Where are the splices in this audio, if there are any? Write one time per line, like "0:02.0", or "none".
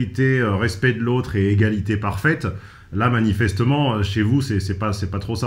none